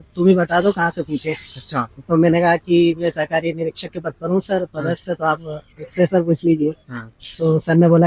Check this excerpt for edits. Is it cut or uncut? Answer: uncut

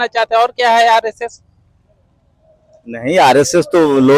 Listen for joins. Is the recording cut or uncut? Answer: uncut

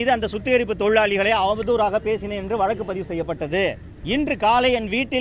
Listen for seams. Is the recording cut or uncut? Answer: cut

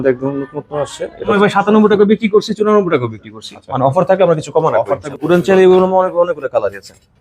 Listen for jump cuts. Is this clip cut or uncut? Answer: cut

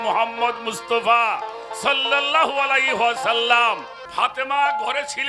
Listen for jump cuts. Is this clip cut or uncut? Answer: cut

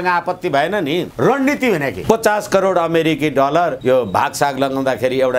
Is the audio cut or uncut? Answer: cut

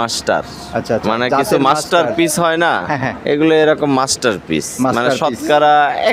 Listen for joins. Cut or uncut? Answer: uncut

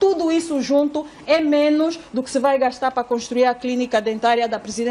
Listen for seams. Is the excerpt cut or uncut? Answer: uncut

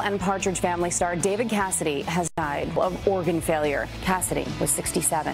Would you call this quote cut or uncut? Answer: uncut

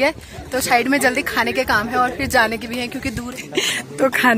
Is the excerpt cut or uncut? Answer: cut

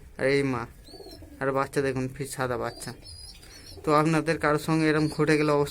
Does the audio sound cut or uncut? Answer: uncut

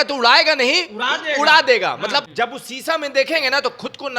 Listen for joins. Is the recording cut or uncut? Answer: cut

